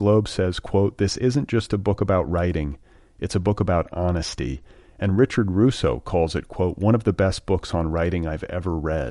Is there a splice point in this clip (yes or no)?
no